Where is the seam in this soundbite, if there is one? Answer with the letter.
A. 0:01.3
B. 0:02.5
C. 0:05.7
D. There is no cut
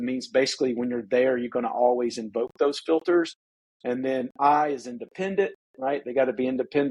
D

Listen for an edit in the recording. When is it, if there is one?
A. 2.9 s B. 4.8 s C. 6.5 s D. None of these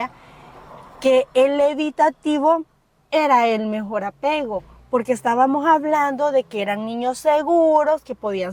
D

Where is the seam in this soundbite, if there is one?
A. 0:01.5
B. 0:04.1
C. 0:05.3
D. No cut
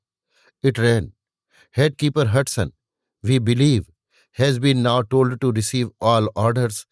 D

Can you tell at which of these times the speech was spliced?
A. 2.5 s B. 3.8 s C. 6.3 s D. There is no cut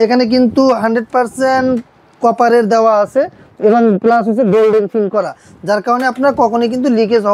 D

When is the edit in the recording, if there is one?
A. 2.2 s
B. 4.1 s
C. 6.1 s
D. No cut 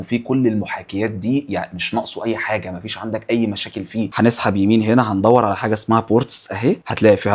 B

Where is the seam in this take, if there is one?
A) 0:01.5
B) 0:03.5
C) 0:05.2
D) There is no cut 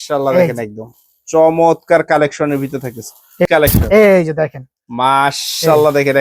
B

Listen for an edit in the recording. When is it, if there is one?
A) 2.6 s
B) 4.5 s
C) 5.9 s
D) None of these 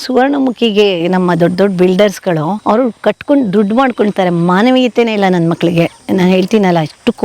A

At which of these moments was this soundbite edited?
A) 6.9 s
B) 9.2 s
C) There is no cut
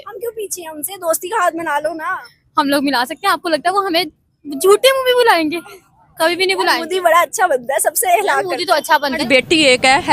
B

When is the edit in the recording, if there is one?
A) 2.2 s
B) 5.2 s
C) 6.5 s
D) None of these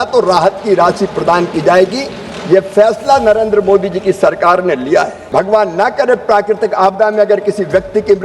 B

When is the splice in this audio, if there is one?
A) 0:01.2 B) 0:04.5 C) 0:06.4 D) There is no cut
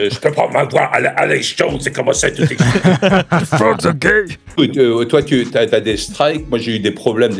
B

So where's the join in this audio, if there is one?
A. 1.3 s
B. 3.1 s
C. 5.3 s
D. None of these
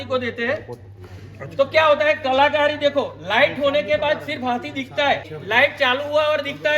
C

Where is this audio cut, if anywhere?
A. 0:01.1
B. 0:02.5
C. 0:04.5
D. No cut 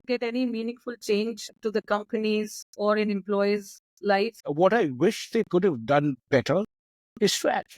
C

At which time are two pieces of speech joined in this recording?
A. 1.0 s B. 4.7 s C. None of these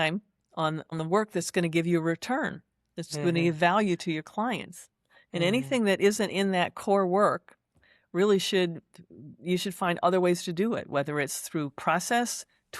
A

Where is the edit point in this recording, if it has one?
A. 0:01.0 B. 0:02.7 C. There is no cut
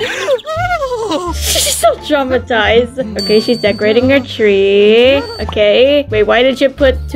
C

